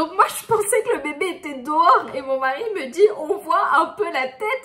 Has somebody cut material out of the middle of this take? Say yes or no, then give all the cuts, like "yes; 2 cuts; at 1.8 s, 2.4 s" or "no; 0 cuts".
no; 0 cuts